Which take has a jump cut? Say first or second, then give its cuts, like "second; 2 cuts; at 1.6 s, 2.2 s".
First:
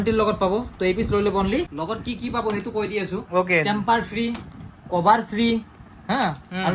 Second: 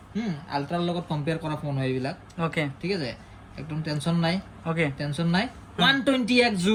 first; 1 cut; at 1.7 s